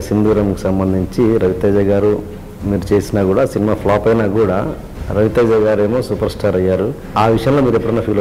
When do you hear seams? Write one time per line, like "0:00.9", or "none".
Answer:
0:07.1